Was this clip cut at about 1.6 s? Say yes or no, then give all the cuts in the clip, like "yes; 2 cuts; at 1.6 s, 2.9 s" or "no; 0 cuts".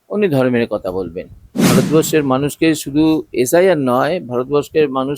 yes; 1 cut; at 1.6 s